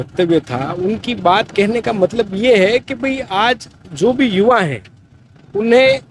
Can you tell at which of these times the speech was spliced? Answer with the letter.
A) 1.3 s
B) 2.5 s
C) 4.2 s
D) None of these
D